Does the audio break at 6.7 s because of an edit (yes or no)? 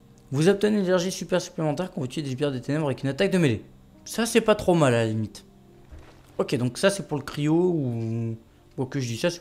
no